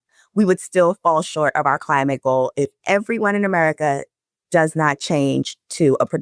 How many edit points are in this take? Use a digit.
1